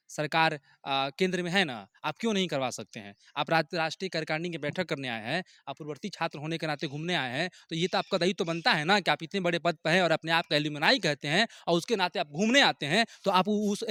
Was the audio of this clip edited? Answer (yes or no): no